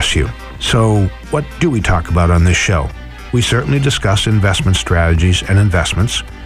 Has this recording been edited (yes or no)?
no